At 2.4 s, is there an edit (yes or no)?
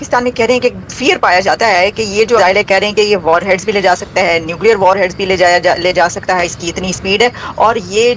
yes